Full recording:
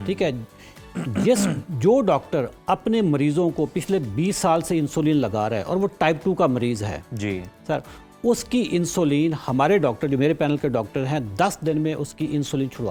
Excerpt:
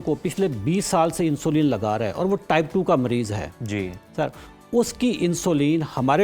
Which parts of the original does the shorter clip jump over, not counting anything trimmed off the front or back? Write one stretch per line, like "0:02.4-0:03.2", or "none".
none